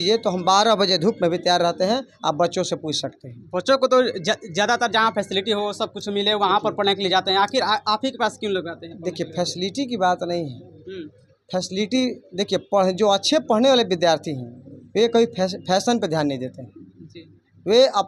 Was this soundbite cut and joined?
no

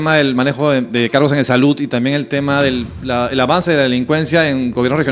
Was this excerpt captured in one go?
yes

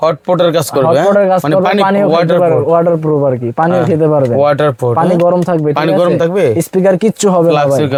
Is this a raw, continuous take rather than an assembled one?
yes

